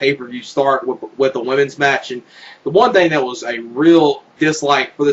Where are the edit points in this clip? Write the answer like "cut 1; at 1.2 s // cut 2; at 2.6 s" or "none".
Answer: cut 1; at 1.4 s